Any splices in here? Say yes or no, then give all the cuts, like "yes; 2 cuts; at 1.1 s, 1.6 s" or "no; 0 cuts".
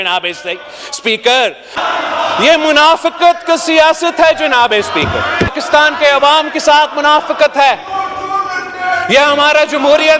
yes; 2 cuts; at 1.8 s, 5.5 s